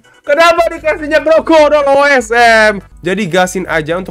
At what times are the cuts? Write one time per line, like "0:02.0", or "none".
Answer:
0:02.9